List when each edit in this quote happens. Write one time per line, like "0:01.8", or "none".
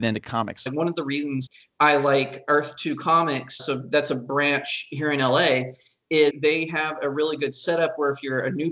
0:00.7
0:01.6
0:03.6
0:06.4